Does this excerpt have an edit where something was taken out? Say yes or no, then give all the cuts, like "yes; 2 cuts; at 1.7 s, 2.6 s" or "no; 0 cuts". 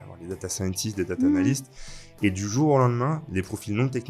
no; 0 cuts